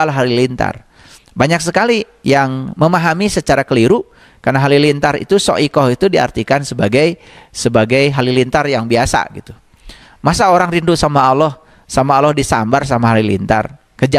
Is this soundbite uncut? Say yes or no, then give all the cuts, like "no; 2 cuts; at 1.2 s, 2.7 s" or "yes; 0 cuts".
yes; 0 cuts